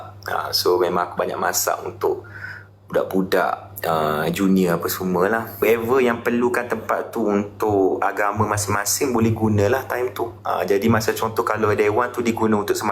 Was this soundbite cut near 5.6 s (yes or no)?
yes